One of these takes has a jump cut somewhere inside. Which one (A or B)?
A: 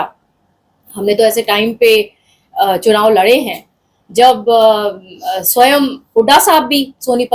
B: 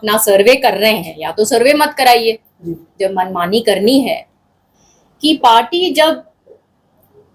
B